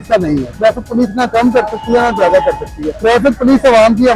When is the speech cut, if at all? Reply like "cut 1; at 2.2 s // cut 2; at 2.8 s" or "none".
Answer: cut 1; at 2.8 s